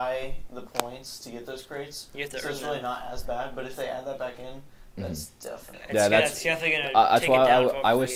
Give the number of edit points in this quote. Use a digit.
0